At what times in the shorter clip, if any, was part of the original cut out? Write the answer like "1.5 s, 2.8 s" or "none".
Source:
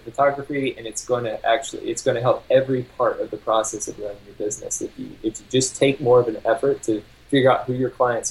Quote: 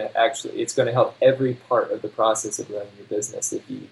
none